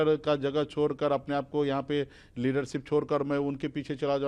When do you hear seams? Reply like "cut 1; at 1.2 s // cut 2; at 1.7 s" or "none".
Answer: none

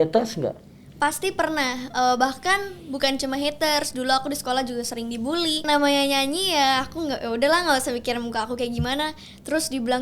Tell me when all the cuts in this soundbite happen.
cut 1; at 5.6 s

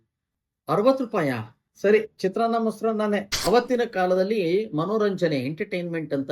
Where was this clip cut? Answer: cut 1; at 3.3 s

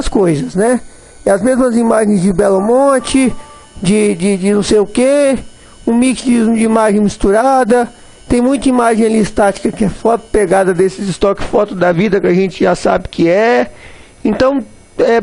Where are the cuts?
cut 1; at 3.7 s

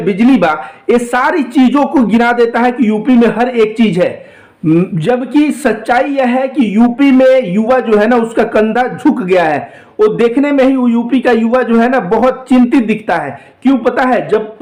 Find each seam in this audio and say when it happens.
none

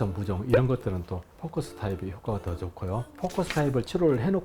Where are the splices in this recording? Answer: cut 1; at 3.1 s

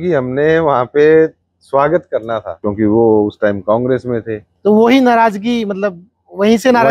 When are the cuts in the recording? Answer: cut 1; at 2.5 s

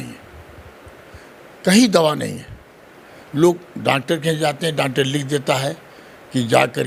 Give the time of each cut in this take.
none

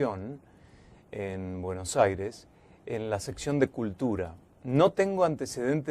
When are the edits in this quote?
cut 1; at 4.9 s

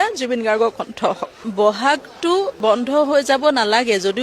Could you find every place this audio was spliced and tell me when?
cut 1; at 1.4 s

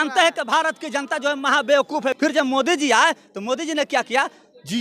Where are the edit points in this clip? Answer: cut 1; at 2.1 s

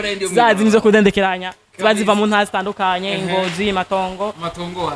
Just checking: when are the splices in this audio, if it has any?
none

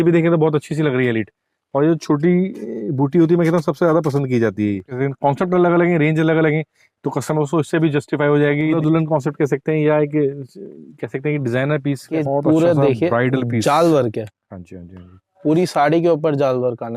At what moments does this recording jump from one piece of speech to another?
cut 1; at 4.9 s // cut 2; at 8.8 s // cut 3; at 12.2 s

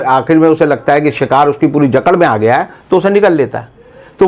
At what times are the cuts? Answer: none

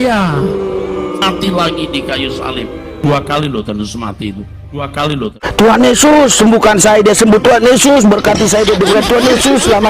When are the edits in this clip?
cut 1; at 1.1 s // cut 2; at 5.4 s

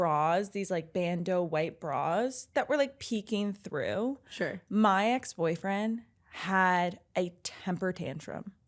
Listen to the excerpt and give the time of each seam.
none

